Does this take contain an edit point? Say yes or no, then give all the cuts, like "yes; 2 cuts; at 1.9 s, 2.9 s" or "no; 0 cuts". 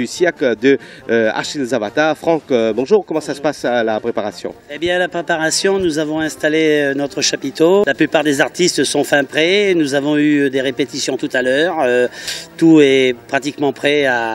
no; 0 cuts